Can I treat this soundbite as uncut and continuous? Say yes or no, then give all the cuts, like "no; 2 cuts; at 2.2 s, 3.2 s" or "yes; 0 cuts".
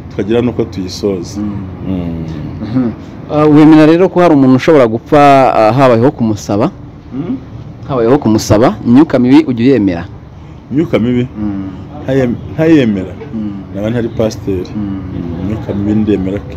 yes; 0 cuts